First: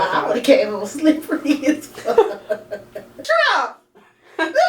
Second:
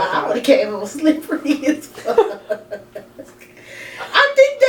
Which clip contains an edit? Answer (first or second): first